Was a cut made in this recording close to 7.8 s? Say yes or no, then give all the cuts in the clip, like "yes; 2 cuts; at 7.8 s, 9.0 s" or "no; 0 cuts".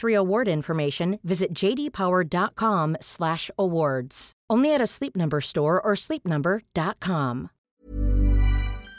yes; 1 cut; at 7.8 s